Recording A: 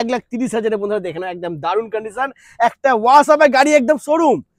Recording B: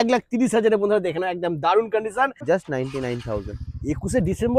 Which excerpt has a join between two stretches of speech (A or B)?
B